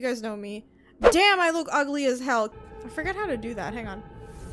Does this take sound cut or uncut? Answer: cut